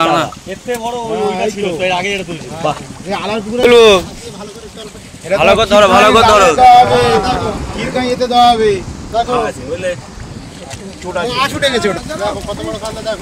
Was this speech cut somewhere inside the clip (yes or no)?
yes